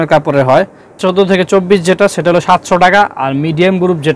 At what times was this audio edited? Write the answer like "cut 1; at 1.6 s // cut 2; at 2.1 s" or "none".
cut 1; at 1.0 s